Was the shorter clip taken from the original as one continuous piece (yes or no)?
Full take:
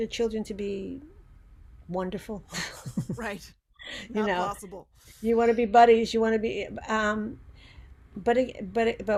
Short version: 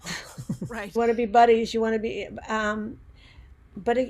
no